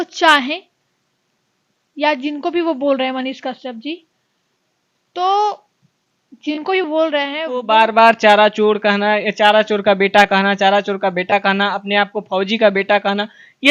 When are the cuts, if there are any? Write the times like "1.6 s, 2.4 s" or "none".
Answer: 7.6 s